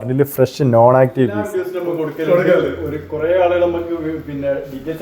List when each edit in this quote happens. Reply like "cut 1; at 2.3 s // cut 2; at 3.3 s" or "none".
cut 1; at 1.5 s